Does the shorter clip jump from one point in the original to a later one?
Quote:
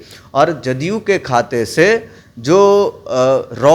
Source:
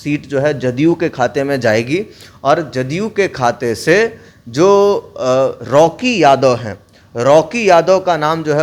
no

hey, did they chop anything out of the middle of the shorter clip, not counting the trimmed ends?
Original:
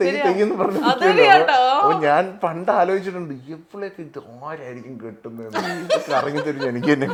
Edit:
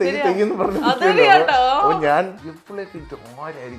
yes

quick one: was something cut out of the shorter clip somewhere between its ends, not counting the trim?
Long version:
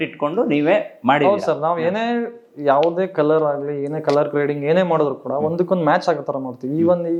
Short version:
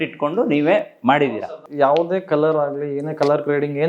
yes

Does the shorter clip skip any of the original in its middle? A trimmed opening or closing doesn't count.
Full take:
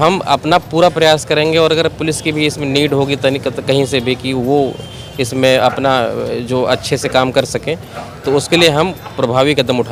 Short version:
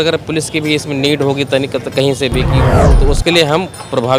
yes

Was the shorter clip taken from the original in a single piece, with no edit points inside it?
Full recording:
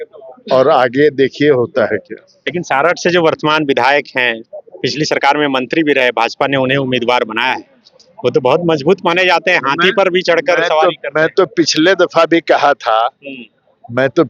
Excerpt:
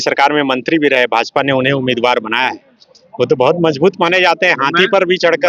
yes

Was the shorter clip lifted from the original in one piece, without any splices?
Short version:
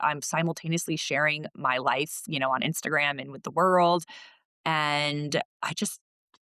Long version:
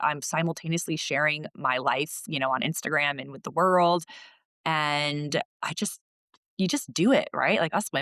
yes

